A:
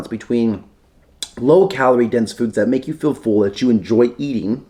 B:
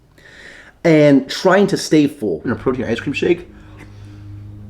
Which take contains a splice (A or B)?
B